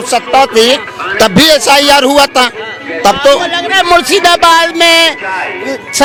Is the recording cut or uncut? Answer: uncut